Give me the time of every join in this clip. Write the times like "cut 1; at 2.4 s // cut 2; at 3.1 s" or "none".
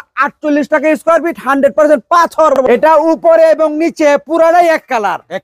cut 1; at 2.6 s